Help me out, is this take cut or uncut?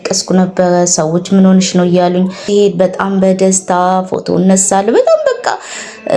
cut